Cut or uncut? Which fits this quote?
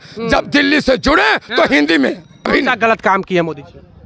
cut